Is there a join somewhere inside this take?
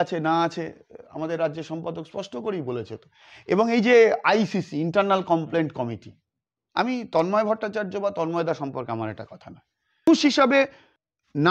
yes; 1 cut; at 10.1 s

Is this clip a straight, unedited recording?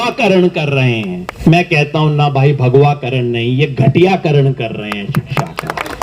no; 1 cut; at 1.2 s

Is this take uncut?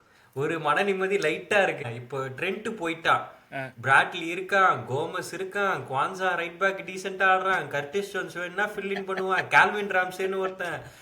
no; 1 cut; at 1.8 s

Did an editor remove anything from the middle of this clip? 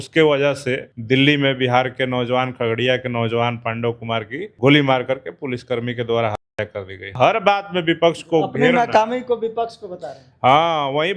yes; 3 cuts; at 0.9 s, 4.4 s, 7.1 s

